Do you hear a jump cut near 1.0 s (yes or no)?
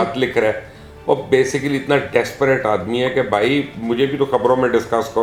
no